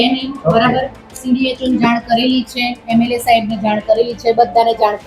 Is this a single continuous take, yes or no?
yes